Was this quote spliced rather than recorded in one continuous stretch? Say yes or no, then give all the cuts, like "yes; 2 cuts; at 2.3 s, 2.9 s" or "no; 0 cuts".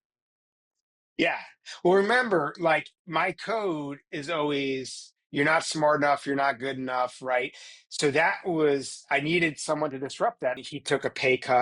yes; 1 cut; at 10.7 s